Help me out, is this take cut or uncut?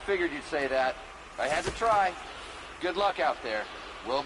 uncut